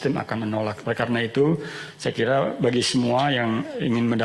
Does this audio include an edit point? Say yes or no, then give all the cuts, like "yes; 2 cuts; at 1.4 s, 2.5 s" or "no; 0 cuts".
no; 0 cuts